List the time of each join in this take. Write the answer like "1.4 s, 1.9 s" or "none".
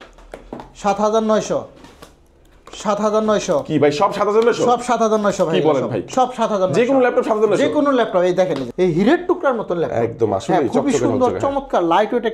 8.7 s